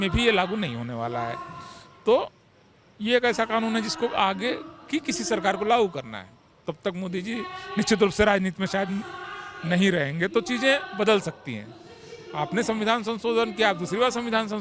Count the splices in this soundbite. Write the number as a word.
zero